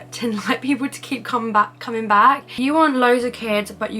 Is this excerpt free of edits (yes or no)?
no